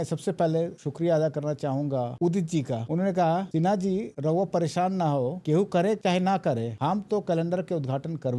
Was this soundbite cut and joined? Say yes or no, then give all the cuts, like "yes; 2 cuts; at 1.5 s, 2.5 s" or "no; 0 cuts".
yes; 1 cut; at 2.8 s